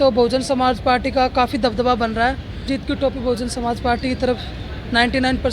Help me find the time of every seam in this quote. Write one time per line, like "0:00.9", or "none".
0:02.6